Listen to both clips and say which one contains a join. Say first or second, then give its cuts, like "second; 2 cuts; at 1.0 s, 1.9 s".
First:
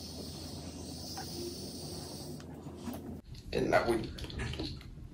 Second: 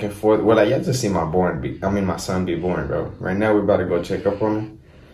first; 1 cut; at 3.2 s